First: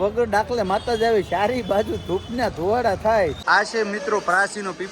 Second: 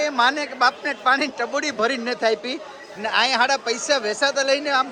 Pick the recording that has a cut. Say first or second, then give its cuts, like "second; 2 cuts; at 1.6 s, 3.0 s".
first; 1 cut; at 3.4 s